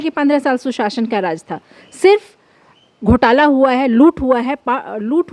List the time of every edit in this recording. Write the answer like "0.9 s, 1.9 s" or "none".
none